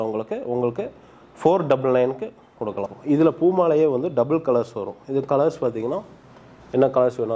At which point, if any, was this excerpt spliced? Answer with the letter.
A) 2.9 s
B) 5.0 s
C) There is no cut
A